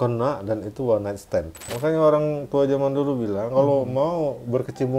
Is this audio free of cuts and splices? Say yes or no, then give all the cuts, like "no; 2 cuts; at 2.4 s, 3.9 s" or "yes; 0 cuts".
no; 1 cut; at 1.6 s